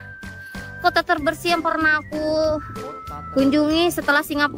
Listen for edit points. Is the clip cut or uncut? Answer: uncut